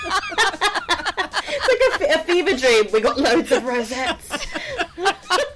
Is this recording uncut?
yes; 0 cuts

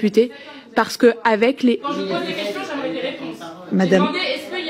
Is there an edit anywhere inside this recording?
yes; 2 cuts; at 1.8 s, 3.5 s

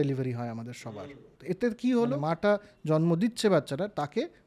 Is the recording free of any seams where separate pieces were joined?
no; 2 cuts; at 1.3 s, 2.2 s

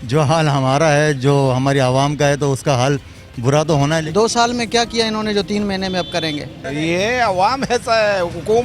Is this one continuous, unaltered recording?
no; 2 cuts; at 4.0 s, 6.6 s

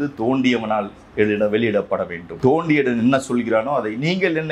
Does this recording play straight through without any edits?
no; 1 cut; at 2.2 s

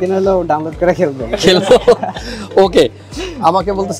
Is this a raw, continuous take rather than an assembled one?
yes; 0 cuts

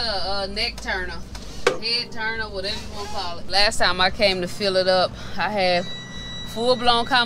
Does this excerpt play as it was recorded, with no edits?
no; 1 cut; at 3.4 s

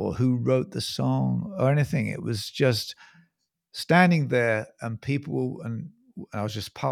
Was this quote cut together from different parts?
no; 0 cuts

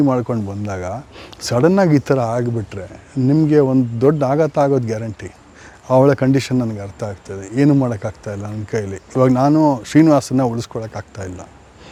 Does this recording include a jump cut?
no; 0 cuts

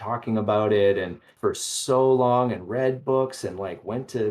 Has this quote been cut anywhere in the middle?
yes; 1 cut; at 1.3 s

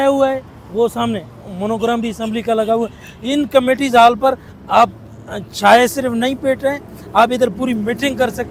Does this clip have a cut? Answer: no; 0 cuts

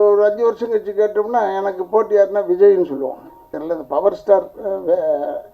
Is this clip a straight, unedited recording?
no; 1 cut; at 3.6 s

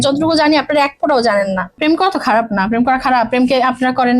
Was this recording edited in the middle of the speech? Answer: yes; 1 cut; at 1.8 s

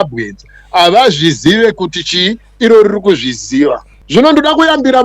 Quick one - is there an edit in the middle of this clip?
yes; 1 cut; at 3.9 s

